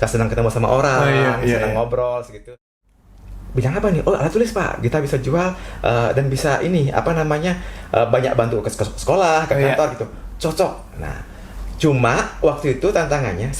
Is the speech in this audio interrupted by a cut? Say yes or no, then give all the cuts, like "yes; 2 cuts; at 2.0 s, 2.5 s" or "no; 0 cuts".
yes; 1 cut; at 2.4 s